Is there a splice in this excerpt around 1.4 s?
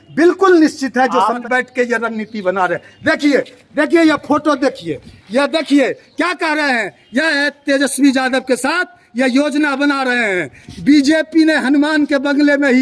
yes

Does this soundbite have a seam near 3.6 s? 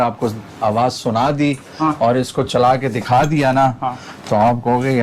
no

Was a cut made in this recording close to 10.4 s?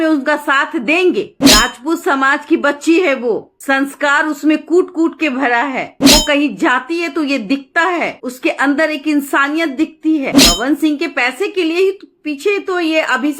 yes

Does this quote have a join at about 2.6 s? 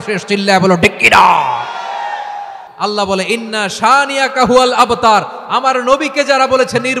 yes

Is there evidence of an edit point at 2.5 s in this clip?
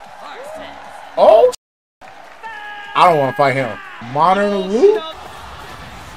no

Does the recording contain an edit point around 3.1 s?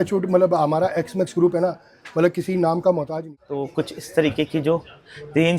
yes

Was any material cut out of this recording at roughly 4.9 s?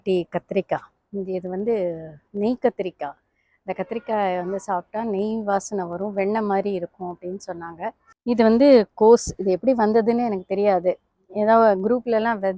no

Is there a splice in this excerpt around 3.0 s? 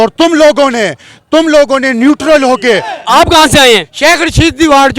yes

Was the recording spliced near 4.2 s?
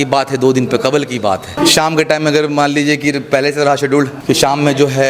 yes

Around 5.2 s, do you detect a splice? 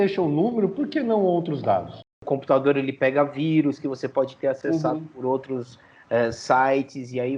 no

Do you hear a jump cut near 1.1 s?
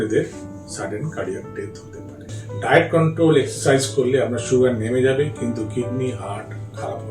no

